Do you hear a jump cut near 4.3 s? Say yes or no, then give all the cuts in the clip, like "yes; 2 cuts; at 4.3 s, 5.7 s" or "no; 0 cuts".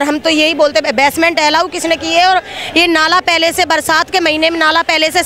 no; 0 cuts